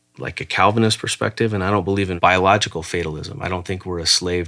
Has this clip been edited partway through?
yes; 1 cut; at 2.1 s

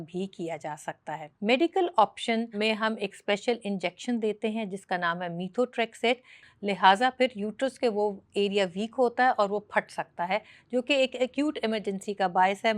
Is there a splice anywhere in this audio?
yes; 2 cuts; at 1.3 s, 6.4 s

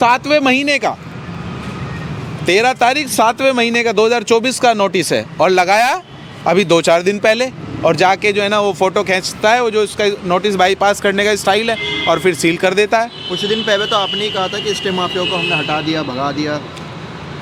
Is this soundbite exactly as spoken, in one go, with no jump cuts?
yes; 0 cuts

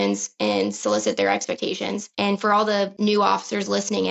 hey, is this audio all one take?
no; 2 cuts; at 2.0 s, 2.9 s

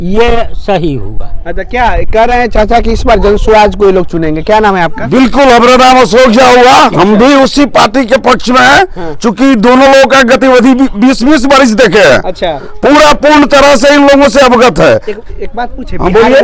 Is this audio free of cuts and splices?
yes; 0 cuts

